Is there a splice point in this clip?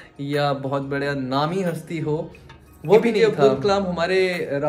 yes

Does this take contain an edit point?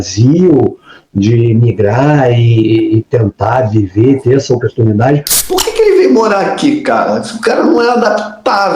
yes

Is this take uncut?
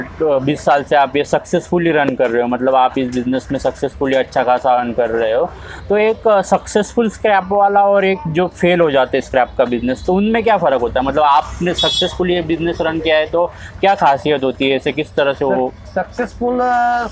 yes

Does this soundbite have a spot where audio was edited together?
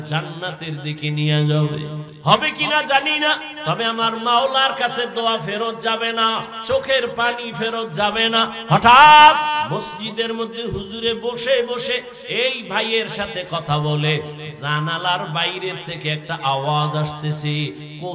yes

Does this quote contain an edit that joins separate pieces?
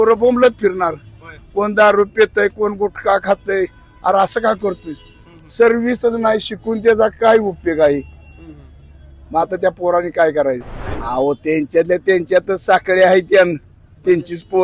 yes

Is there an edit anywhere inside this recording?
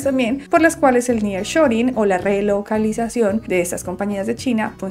no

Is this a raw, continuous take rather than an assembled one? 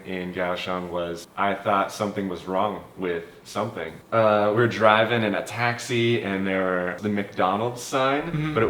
no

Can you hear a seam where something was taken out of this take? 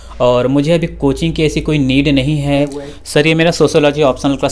yes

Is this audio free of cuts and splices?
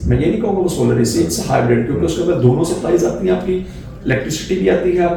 yes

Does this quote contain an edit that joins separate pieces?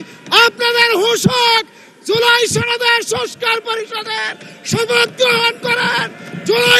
no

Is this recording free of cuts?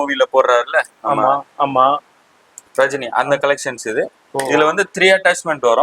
yes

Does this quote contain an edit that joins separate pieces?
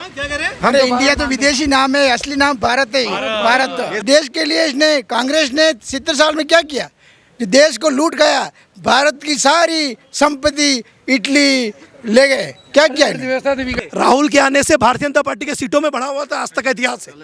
yes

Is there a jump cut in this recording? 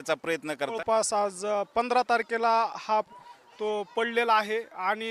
yes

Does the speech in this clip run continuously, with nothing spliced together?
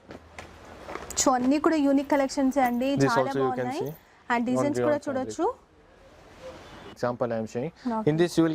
no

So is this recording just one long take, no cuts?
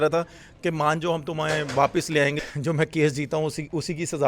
no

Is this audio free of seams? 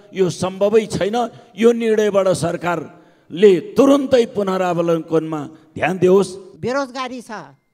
no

